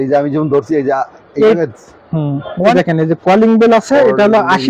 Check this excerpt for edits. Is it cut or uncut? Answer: cut